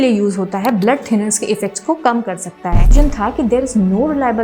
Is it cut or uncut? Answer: cut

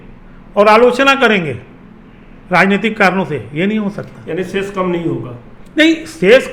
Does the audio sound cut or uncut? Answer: uncut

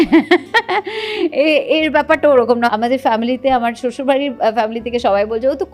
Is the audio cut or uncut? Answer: cut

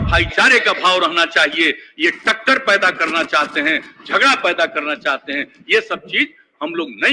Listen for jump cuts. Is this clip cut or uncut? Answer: uncut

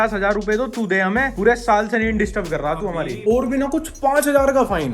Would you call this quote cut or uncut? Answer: cut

